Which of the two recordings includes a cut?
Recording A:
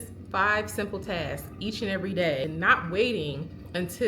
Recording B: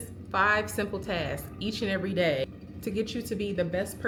A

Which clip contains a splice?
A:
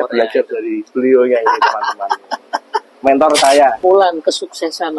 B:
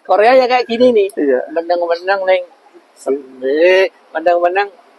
A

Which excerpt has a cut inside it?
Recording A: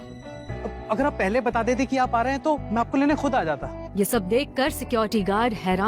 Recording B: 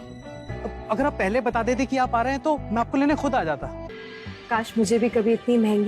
B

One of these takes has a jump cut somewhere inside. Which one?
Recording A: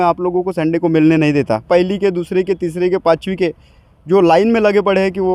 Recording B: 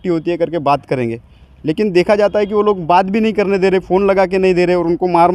A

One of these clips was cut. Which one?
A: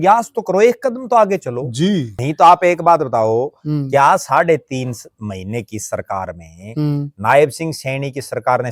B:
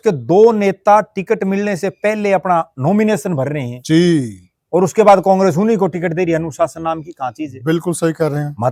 A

